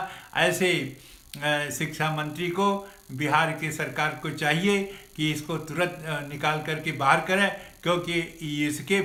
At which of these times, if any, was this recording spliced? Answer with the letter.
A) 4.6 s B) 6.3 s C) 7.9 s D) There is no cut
D